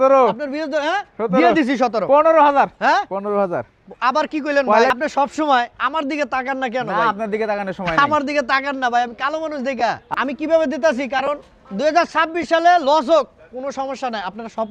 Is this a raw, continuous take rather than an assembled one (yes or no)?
no